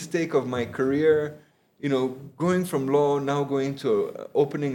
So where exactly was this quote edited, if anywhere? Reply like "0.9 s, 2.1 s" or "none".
none